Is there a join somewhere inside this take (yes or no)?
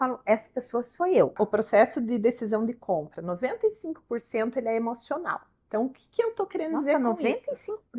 yes